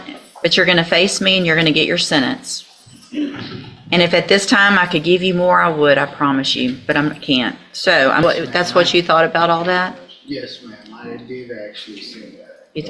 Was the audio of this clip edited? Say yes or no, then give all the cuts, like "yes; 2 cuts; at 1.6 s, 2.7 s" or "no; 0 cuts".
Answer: yes; 1 cut; at 8.2 s